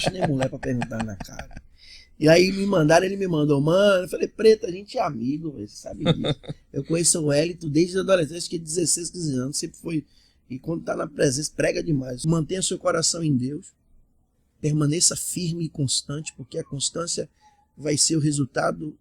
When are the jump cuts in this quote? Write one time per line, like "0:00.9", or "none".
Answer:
0:12.2